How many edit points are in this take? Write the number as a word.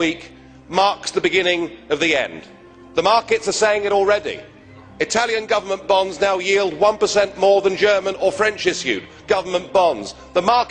zero